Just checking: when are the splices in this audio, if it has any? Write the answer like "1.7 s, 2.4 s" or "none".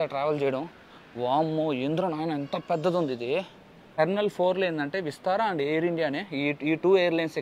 none